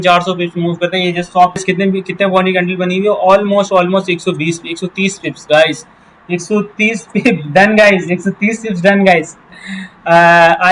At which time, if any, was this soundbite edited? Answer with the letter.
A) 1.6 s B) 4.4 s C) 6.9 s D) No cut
A